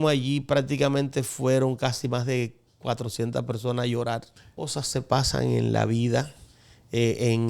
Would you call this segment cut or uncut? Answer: cut